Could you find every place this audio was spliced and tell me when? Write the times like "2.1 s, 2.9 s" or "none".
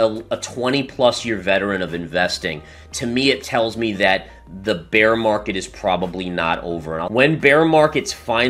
7.1 s